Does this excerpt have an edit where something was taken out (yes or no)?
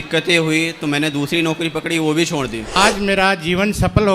yes